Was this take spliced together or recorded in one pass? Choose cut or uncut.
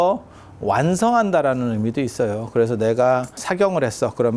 uncut